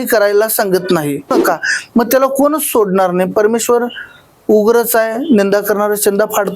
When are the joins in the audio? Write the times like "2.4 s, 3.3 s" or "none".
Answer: 1.3 s